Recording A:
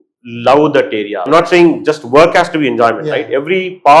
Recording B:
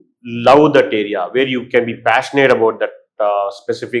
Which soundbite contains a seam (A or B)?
A